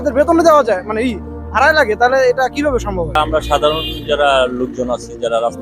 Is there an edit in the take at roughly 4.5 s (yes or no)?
no